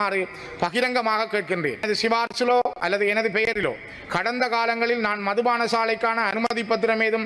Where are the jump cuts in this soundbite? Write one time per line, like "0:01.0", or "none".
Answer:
0:01.8